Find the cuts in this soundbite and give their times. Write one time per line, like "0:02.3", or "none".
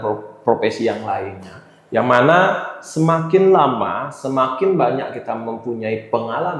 none